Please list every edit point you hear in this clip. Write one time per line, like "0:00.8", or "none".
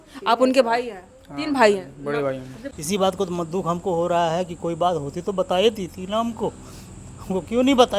0:02.6